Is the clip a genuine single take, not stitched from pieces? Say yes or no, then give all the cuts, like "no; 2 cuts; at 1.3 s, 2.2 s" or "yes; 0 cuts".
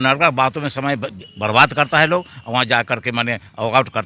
yes; 0 cuts